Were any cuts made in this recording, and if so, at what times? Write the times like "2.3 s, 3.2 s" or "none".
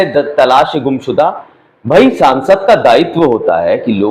none